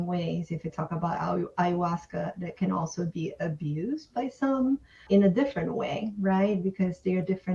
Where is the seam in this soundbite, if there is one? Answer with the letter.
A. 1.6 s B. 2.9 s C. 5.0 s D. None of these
C